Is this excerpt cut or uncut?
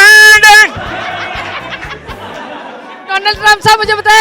uncut